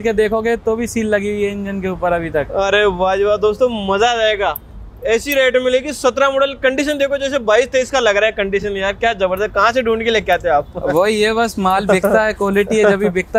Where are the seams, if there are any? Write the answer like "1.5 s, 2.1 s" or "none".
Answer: none

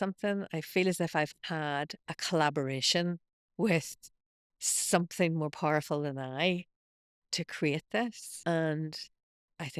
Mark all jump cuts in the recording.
8.3 s

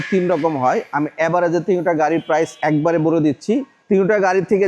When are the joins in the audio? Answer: 2.5 s, 3.7 s

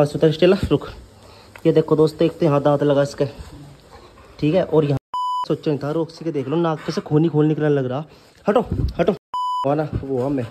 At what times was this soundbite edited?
5.2 s, 9.7 s

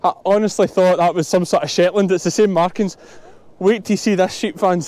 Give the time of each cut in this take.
none

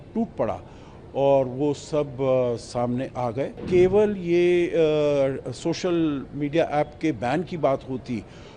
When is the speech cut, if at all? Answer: 3.6 s

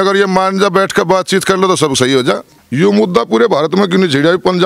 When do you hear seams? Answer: 2.6 s

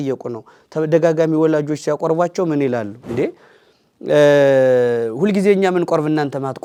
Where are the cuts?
none

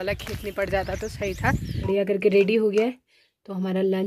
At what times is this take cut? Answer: 1.9 s

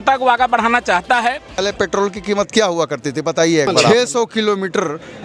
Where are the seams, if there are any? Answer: 1.6 s, 3.9 s

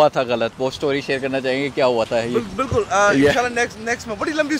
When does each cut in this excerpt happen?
none

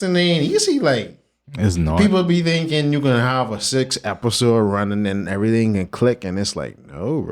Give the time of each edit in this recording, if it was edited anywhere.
none

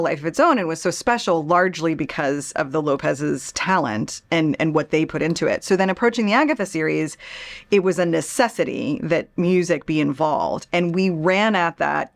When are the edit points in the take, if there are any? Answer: none

